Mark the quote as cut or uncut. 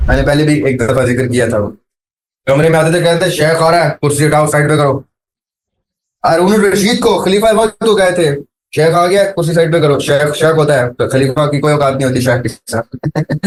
uncut